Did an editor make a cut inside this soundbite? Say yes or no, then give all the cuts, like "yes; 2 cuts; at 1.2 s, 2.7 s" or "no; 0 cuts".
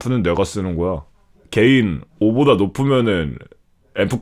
no; 0 cuts